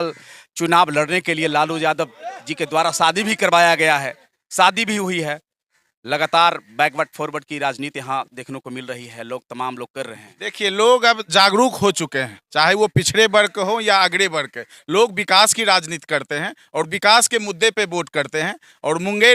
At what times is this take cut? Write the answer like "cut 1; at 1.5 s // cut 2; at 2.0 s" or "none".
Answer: none